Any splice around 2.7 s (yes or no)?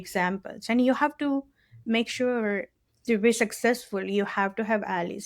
yes